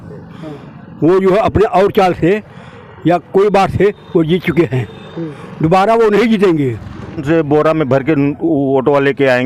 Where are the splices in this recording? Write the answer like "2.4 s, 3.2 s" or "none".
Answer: 7.2 s